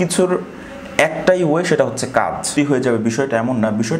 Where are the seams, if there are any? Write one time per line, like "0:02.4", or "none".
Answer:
0:02.5